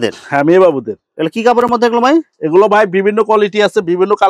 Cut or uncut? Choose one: uncut